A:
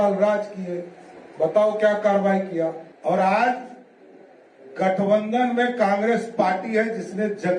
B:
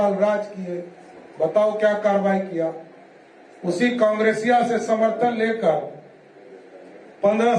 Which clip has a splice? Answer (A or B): A